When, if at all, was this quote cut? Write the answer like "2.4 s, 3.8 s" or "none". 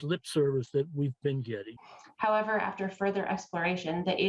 1.8 s